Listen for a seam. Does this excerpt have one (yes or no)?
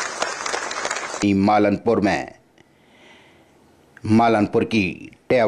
yes